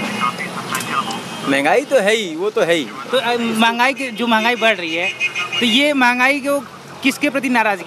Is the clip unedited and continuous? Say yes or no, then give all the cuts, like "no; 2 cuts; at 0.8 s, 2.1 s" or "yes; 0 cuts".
yes; 0 cuts